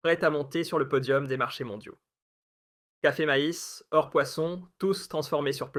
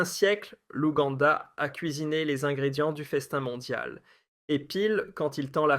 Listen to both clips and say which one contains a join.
second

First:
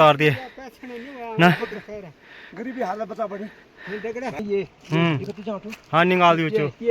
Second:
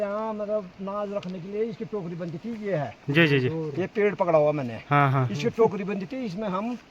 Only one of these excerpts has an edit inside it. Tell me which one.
first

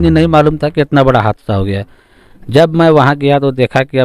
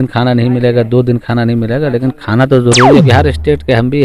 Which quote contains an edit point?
second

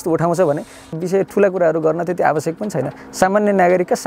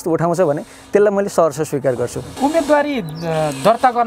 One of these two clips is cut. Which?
first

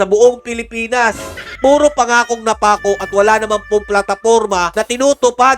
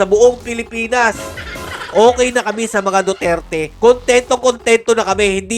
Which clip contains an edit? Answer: second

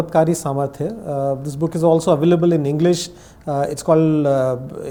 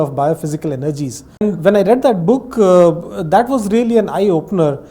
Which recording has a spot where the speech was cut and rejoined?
second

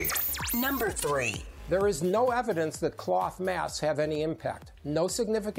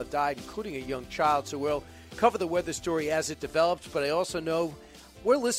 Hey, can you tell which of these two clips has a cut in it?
first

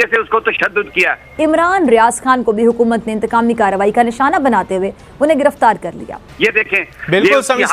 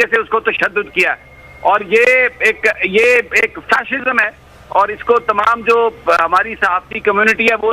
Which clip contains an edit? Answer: first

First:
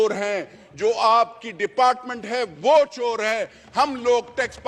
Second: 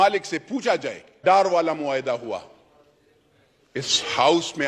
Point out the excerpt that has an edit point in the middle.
second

